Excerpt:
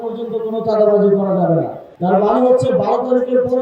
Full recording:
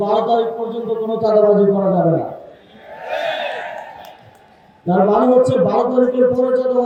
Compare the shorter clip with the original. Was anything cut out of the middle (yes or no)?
yes